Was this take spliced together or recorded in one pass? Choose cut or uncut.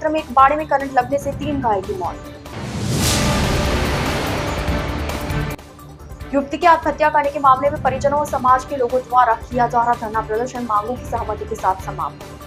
uncut